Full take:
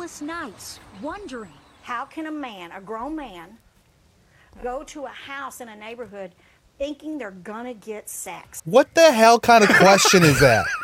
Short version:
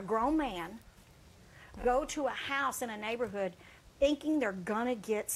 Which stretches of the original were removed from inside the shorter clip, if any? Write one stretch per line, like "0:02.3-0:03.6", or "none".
none